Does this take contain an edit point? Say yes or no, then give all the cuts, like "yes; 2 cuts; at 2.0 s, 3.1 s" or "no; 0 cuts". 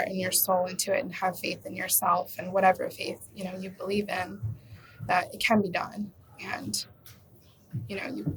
no; 0 cuts